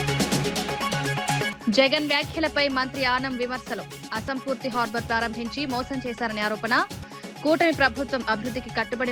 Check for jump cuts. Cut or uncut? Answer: uncut